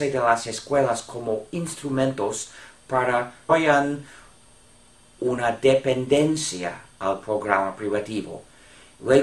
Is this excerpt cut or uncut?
uncut